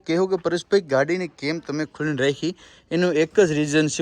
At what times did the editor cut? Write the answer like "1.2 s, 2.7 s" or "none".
none